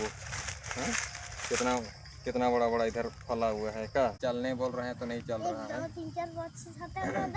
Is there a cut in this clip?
yes; 1 cut; at 4.2 s

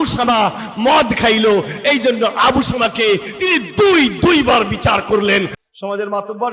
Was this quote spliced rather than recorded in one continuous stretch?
yes; 1 cut; at 5.6 s

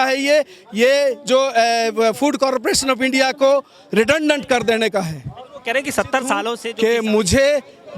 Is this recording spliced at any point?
yes; 1 cut; at 6.6 s

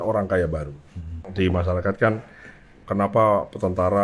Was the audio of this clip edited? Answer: yes; 1 cut; at 1.3 s

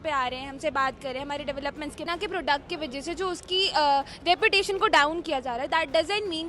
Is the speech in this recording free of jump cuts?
no; 1 cut; at 2.0 s

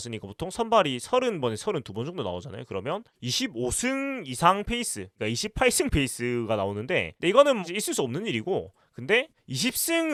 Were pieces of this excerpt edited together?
no; 0 cuts

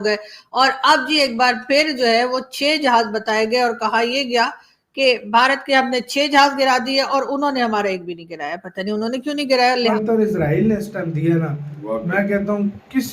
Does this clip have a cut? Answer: yes; 1 cut; at 9.9 s

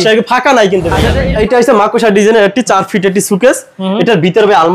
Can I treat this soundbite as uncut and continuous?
no; 1 cut; at 1.1 s

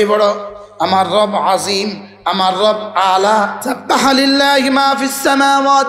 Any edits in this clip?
yes; 1 cut; at 3.6 s

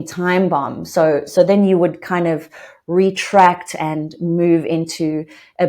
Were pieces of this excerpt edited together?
no; 0 cuts

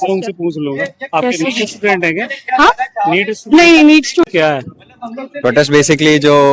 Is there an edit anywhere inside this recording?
yes; 1 cut; at 4.3 s

